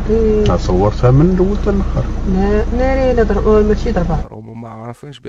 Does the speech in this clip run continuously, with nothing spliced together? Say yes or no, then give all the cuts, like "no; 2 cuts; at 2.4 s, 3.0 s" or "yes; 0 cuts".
no; 1 cut; at 4.3 s